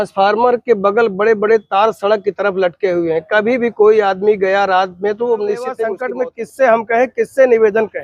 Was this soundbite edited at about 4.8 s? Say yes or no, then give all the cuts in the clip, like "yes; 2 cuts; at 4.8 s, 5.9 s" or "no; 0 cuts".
no; 1 cut; at 6.0 s